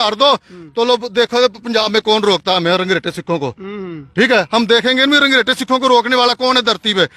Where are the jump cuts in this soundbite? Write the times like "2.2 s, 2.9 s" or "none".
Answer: none